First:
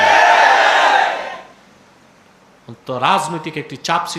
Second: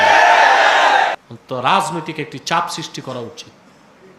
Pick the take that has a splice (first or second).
second